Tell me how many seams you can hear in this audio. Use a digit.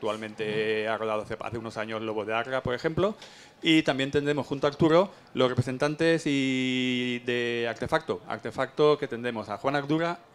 1